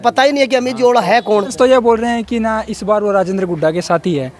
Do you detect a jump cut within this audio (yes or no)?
yes